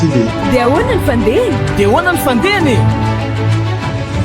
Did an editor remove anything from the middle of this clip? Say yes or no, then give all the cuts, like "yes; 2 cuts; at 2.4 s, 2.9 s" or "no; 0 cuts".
no; 0 cuts